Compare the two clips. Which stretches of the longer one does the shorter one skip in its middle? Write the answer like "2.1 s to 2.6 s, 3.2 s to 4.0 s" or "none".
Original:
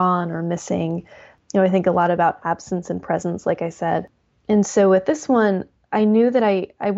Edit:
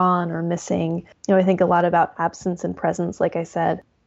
1.1 s to 1.3 s